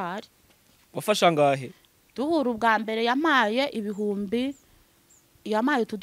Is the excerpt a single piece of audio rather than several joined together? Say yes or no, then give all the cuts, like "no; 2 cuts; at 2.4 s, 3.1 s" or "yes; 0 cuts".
yes; 0 cuts